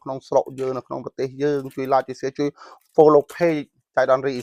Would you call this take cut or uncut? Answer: uncut